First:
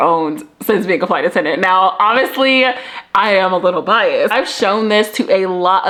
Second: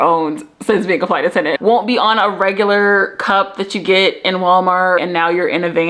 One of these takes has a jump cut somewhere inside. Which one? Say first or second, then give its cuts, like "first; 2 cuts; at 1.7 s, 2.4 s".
second; 2 cuts; at 1.6 s, 5.0 s